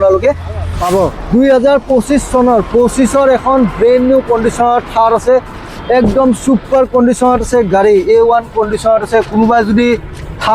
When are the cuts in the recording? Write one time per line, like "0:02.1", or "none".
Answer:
0:01.2